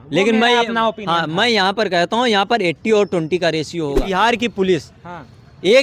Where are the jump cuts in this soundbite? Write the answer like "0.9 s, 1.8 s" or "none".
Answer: 4.1 s